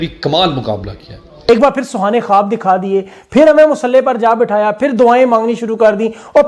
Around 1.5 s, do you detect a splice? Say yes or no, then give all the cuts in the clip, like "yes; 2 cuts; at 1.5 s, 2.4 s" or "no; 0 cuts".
yes; 1 cut; at 1.5 s